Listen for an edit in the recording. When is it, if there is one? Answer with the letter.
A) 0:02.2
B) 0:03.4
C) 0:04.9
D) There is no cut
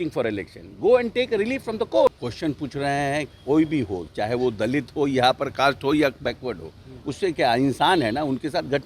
A